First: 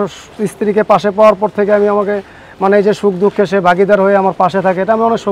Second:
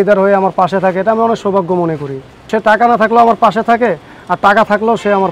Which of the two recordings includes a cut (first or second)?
second